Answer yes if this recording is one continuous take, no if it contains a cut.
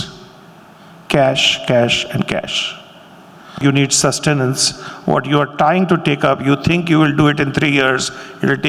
no